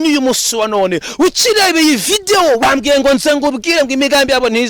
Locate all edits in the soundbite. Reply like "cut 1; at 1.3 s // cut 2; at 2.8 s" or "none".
cut 1; at 2.6 s